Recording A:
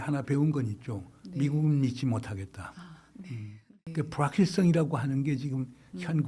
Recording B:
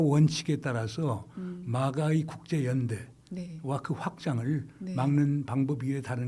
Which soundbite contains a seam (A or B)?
A